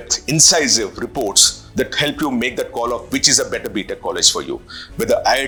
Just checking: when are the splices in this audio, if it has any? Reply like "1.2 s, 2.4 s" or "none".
none